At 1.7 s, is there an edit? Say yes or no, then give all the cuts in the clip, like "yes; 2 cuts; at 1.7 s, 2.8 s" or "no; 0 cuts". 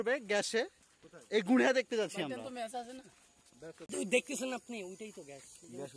no; 1 cut; at 4.0 s